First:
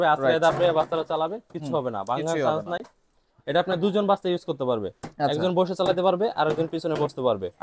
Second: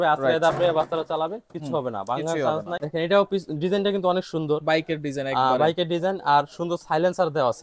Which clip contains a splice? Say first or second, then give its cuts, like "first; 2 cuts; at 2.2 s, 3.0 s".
second; 1 cut; at 2.8 s